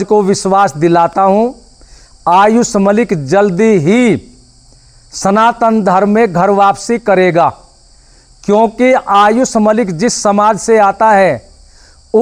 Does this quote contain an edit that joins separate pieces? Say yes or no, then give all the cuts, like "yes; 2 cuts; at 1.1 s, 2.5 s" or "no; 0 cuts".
no; 0 cuts